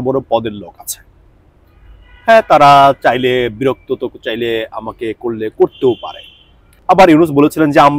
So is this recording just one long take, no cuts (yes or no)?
no